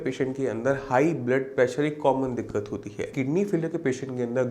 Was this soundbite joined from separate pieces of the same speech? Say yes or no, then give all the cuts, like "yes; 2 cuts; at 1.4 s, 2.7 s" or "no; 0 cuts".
yes; 1 cut; at 3.1 s